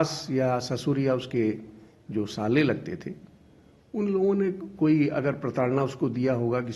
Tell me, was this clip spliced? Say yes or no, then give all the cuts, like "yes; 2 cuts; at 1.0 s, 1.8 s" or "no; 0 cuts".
no; 0 cuts